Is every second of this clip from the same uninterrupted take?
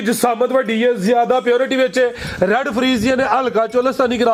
yes; 0 cuts

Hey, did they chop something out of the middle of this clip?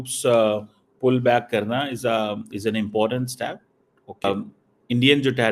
yes; 1 cut; at 4.2 s

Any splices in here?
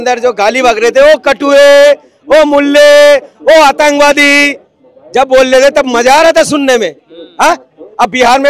no; 0 cuts

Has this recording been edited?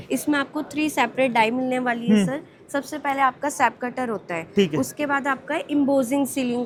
no; 0 cuts

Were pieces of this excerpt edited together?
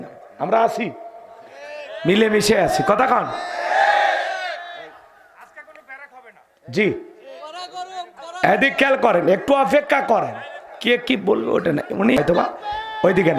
yes; 1 cut; at 12.2 s

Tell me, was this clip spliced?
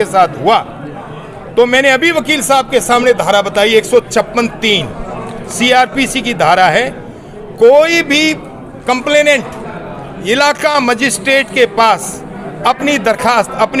no; 0 cuts

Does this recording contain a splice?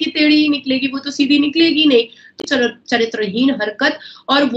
yes; 1 cut; at 2.4 s

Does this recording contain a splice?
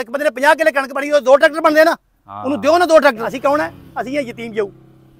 yes; 1 cut; at 3.3 s

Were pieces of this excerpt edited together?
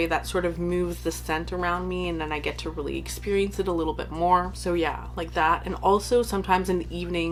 no; 0 cuts

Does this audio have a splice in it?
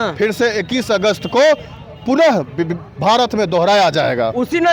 no; 0 cuts

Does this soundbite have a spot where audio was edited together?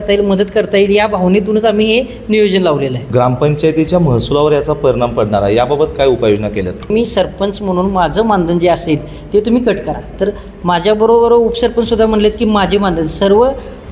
yes; 2 cuts; at 3.0 s, 6.9 s

